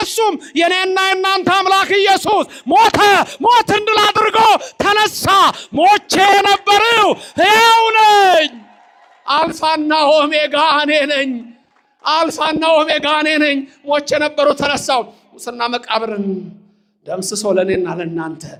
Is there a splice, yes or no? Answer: no